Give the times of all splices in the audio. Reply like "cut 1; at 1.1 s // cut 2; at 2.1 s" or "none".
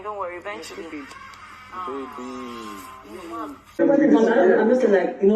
cut 1; at 3.8 s

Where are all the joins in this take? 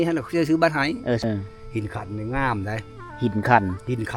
cut 1; at 1.2 s

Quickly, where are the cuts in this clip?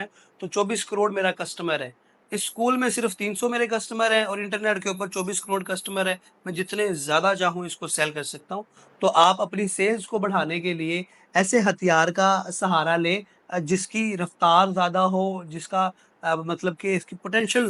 none

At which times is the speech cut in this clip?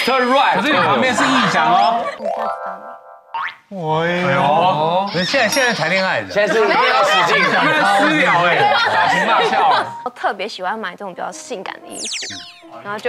cut 1; at 2.1 s // cut 2; at 10.1 s

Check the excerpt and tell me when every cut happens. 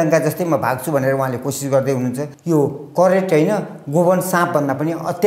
cut 1; at 2.3 s

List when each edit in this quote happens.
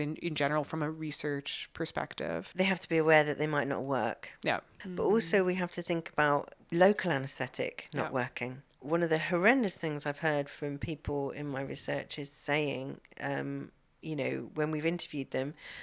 cut 1; at 2.5 s // cut 2; at 4.8 s // cut 3; at 6.6 s // cut 4; at 8.7 s

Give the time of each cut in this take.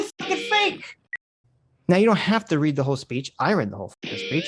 cut 1; at 1.0 s

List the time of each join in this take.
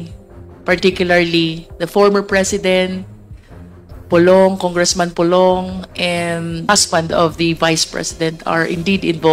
cut 1; at 6.7 s

